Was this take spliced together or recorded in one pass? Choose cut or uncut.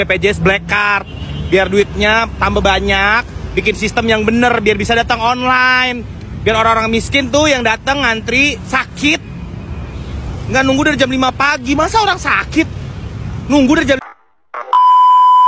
cut